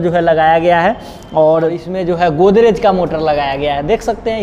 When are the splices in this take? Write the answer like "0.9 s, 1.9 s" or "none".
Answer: 1.9 s